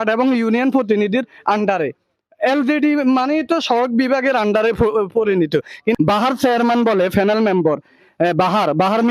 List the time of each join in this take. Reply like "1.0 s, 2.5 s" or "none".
6.0 s